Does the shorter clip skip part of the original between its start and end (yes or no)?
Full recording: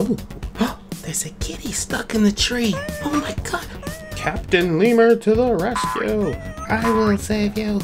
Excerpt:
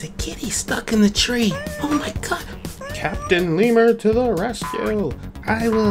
no